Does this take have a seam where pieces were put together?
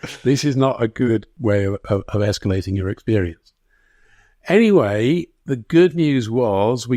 yes; 1 cut; at 1.3 s

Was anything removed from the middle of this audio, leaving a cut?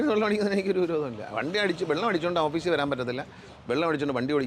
no; 0 cuts

